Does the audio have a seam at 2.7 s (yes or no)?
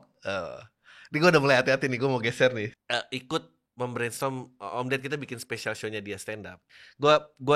yes